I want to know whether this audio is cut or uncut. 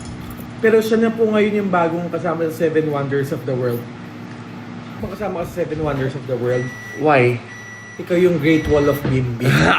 cut